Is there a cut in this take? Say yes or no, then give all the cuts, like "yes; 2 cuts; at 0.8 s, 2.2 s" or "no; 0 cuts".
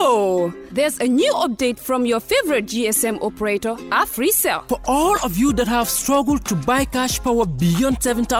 no; 0 cuts